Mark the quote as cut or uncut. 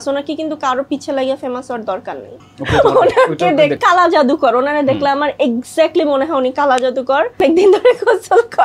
cut